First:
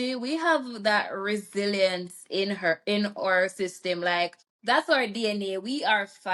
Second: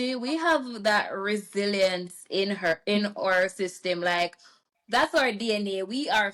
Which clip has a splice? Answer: first; 1 cut; at 4.5 s

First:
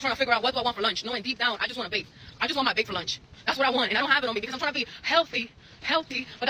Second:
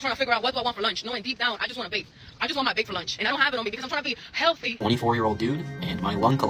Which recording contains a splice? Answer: second; 2 cuts; at 3.2 s, 4.7 s

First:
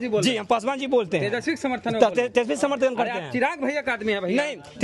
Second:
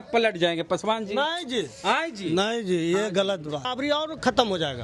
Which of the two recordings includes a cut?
second; 1 cut; at 3.7 s

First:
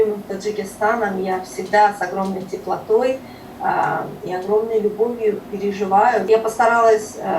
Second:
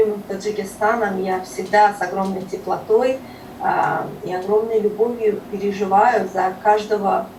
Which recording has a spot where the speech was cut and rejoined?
first; 1 cut; at 6.2 s

